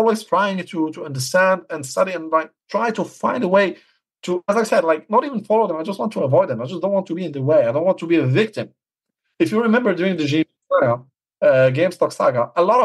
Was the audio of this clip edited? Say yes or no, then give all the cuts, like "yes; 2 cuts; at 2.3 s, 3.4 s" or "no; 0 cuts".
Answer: no; 0 cuts